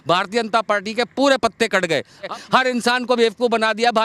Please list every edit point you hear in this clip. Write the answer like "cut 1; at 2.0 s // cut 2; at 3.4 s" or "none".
cut 1; at 2.3 s